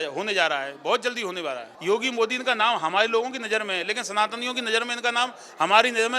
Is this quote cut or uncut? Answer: cut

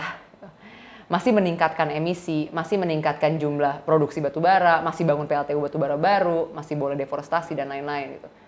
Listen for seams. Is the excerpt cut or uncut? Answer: uncut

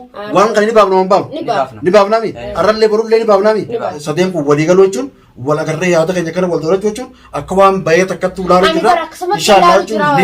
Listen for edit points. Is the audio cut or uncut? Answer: cut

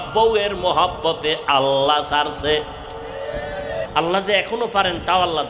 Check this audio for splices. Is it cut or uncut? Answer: cut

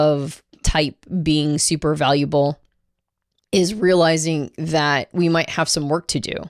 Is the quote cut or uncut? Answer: uncut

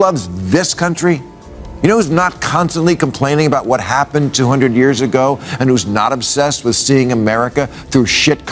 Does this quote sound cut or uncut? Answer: uncut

